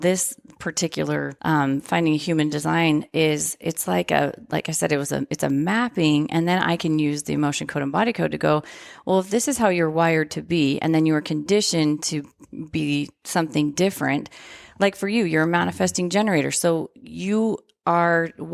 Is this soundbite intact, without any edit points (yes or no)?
no